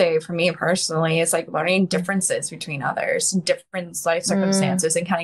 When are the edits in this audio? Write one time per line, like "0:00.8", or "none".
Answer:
none